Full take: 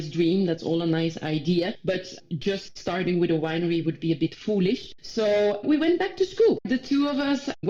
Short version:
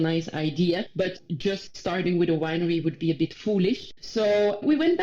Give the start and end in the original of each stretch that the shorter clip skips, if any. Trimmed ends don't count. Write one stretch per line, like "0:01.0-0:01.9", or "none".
0:02.1-0:02.3